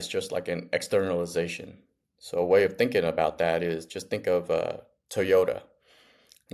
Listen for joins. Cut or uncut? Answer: uncut